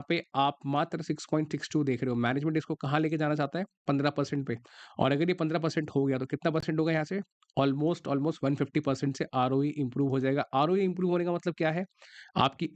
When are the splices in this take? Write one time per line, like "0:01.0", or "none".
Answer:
none